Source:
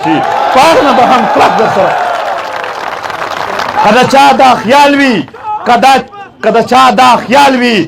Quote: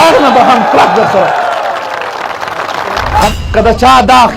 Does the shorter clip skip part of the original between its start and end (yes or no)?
yes